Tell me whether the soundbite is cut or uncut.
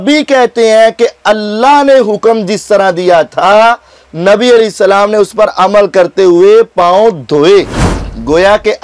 uncut